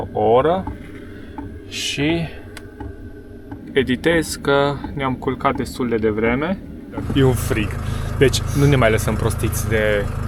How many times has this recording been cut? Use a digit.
1